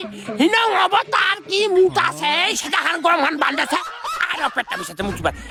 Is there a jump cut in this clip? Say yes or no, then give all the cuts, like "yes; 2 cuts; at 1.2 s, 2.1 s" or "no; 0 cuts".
no; 0 cuts